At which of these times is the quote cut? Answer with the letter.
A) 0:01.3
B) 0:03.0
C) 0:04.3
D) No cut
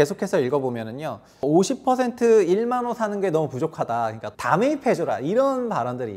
C